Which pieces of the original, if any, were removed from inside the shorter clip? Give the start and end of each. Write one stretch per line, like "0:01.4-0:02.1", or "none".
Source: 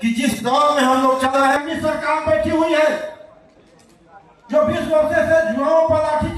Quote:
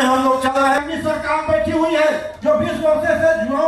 0:03.1-0:04.4